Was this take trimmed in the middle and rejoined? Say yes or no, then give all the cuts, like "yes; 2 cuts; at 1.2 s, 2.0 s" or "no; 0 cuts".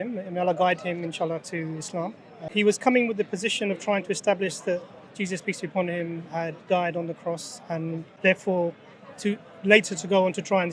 yes; 2 cuts; at 2.3 s, 8.1 s